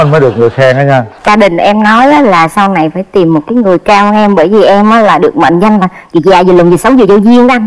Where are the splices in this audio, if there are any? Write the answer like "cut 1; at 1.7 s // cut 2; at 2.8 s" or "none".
cut 1; at 1.3 s